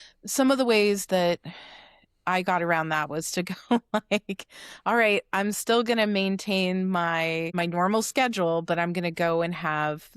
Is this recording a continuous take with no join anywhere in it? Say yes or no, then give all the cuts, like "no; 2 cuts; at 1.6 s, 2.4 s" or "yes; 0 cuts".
no; 1 cut; at 7.5 s